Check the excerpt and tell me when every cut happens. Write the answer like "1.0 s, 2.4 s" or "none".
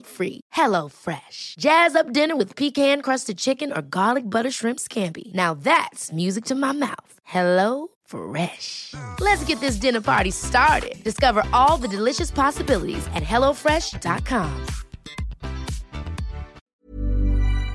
16.6 s